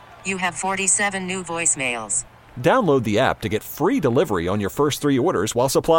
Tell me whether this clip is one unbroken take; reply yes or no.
yes